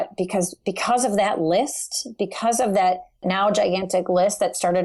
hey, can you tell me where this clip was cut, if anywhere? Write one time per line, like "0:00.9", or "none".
0:03.2